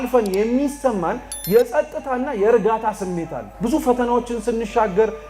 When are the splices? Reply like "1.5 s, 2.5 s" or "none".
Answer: 3.4 s